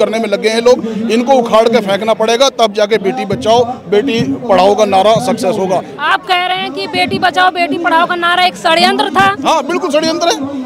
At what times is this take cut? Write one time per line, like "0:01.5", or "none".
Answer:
0:05.9